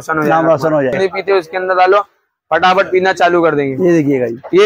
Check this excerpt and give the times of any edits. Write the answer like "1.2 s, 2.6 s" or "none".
1.0 s